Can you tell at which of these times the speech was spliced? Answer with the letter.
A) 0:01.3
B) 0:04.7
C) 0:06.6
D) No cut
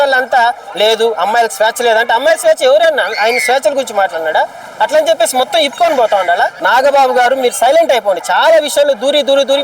C